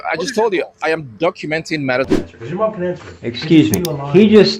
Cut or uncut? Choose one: cut